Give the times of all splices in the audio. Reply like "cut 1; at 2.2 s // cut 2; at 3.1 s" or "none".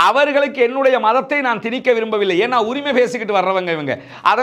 none